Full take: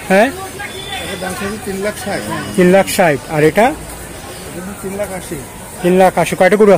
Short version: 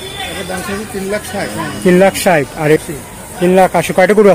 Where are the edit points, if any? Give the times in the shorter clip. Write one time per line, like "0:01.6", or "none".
0:02.8